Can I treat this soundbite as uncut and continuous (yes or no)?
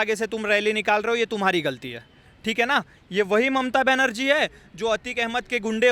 yes